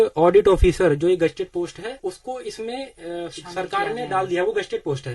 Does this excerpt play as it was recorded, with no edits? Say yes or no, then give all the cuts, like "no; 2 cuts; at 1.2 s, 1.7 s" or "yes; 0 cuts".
no; 1 cut; at 2.0 s